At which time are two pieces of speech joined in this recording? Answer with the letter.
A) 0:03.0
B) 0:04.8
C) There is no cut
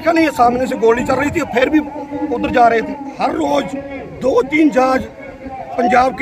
A